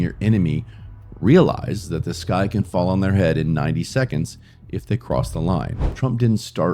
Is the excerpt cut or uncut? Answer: cut